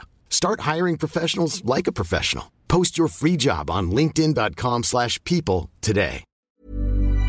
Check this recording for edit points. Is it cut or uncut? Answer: cut